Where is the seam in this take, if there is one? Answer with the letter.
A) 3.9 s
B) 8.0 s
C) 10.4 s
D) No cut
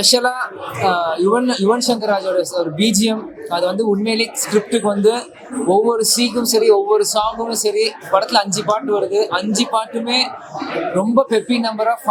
D